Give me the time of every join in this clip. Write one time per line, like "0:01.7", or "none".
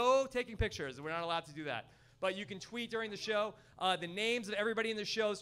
none